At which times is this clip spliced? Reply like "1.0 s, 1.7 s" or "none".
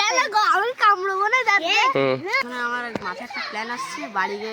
2.4 s